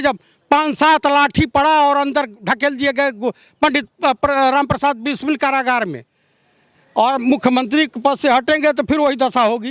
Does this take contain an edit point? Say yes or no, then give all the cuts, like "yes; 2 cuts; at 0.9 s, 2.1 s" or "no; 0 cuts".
no; 0 cuts